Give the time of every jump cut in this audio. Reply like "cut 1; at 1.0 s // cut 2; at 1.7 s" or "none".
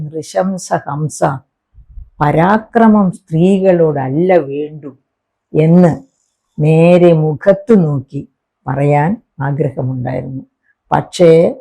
none